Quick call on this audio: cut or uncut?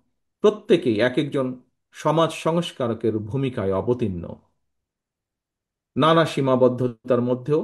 uncut